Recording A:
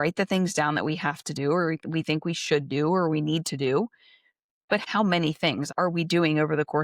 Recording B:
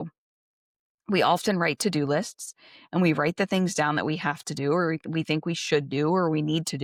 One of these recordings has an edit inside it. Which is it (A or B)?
A